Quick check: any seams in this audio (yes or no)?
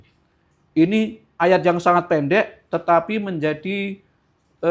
no